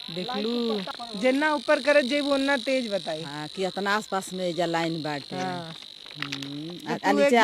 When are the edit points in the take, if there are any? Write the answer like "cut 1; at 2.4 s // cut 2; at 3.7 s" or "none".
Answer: cut 1; at 1.0 s